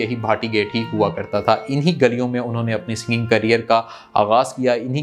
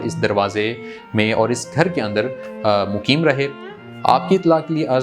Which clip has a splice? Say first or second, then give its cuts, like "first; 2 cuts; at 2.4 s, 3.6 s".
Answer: second; 1 cut; at 3.7 s